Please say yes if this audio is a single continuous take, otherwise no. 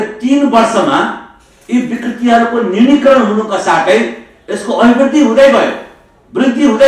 yes